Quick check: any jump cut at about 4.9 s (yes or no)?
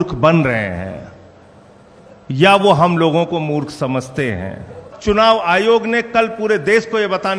yes